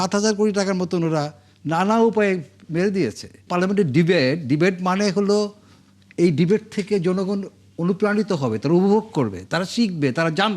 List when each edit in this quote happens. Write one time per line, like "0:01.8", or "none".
0:03.4